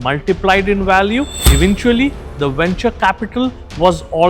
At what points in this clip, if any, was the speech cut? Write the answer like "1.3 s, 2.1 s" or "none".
1.4 s